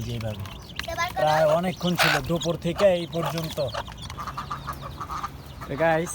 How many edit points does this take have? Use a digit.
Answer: 1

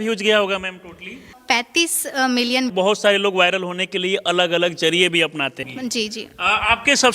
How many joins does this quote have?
3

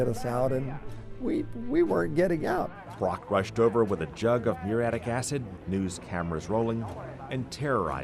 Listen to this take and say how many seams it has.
0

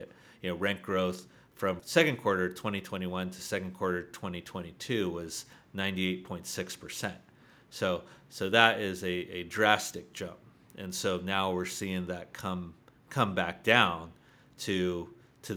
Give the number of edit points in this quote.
1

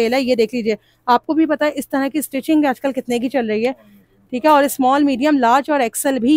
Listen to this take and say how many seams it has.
0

